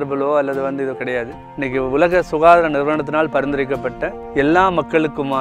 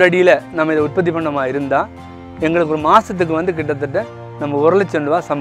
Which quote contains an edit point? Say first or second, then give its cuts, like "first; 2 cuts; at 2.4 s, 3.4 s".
first; 2 cuts; at 1.4 s, 4.1 s